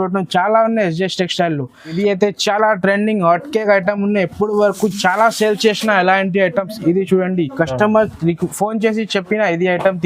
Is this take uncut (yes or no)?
no